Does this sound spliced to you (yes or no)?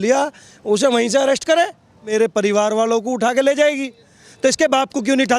yes